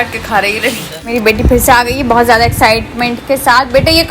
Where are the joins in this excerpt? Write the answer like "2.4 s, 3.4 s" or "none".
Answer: 1.1 s

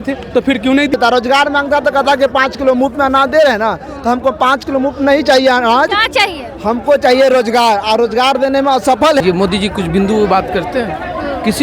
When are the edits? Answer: 0.9 s, 9.2 s

